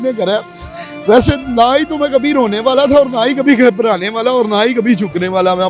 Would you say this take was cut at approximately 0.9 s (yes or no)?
no